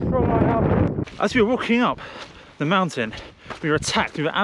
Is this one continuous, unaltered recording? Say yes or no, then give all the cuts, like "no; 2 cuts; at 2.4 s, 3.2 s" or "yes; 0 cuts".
no; 1 cut; at 1.0 s